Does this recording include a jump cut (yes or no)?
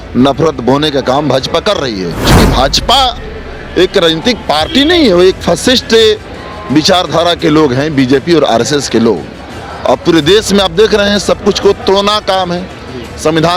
yes